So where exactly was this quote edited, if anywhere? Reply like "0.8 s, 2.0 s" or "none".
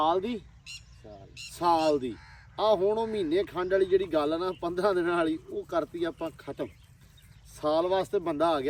none